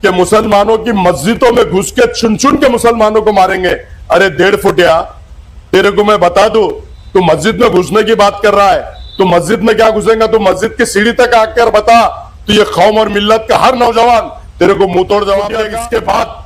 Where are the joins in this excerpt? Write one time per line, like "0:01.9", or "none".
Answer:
0:15.6